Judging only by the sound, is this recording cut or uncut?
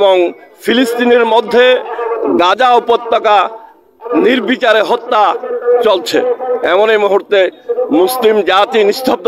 uncut